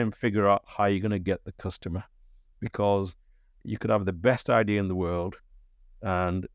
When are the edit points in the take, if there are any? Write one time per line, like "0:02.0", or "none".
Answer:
none